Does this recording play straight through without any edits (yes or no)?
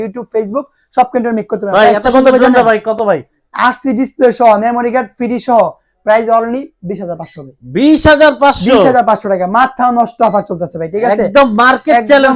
yes